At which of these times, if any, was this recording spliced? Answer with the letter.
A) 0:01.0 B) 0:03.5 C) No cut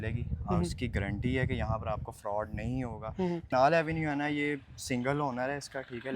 B